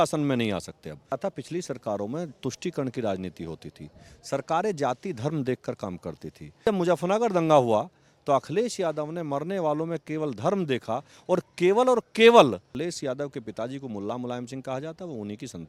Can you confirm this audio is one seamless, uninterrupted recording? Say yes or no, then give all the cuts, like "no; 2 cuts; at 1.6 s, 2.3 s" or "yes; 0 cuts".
no; 3 cuts; at 1.2 s, 6.6 s, 12.7 s